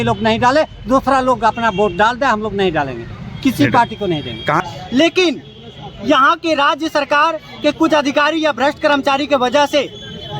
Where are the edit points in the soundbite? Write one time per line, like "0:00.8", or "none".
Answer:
0:04.6